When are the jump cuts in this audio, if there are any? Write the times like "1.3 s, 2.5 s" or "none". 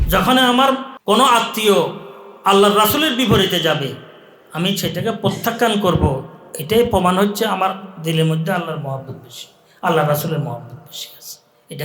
0.9 s